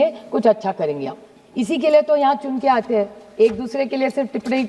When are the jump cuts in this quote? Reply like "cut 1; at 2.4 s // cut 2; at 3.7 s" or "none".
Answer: none